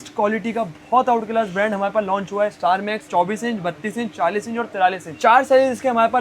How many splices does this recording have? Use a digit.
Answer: 1